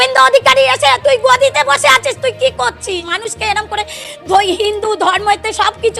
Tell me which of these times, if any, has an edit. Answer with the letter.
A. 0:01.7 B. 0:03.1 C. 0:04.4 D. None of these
B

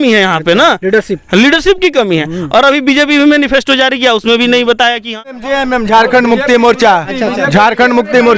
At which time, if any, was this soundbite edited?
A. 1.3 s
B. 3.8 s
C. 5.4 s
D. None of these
C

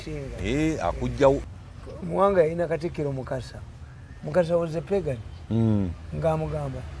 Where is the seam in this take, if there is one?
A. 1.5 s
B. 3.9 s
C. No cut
A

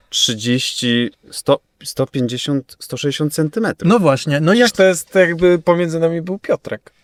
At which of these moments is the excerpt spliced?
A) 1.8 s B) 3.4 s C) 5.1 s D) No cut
D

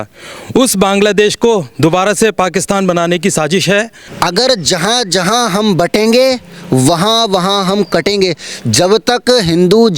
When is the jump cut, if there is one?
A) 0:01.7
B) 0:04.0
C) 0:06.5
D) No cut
B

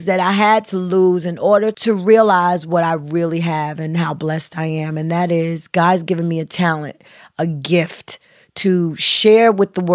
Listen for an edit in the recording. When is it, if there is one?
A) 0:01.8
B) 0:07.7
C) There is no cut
A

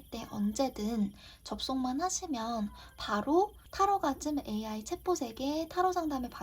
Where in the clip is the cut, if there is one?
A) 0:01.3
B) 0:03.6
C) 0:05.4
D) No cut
B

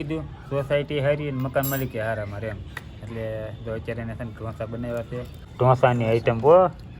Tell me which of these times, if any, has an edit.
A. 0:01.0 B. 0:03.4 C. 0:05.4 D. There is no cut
C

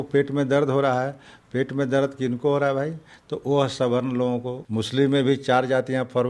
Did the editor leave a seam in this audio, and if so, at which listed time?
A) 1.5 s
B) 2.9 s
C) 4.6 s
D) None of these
C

